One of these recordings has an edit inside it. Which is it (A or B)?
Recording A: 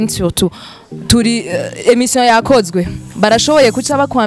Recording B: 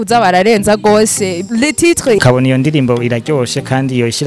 B